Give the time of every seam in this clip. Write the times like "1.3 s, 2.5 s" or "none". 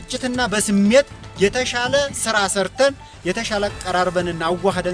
none